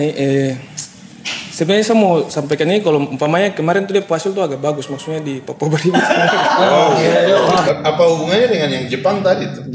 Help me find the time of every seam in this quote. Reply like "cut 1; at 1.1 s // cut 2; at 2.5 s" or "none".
cut 1; at 7.6 s